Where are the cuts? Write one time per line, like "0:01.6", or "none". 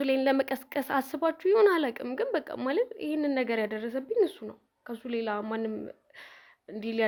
none